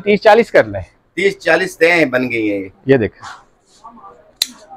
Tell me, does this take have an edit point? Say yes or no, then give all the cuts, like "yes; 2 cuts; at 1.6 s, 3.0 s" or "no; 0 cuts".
no; 0 cuts